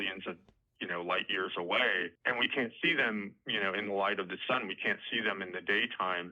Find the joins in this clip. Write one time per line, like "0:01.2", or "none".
0:02.2
0:03.4